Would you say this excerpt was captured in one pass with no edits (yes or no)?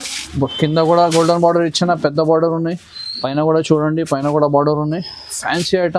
yes